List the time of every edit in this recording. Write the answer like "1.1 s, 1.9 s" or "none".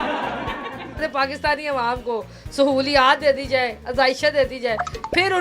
1.0 s